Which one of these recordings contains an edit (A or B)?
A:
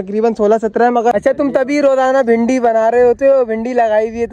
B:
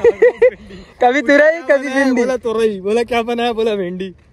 A